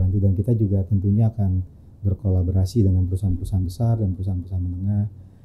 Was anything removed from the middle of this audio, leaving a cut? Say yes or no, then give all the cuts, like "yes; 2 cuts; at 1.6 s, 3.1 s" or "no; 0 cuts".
no; 0 cuts